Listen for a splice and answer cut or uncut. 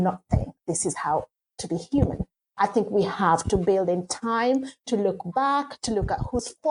uncut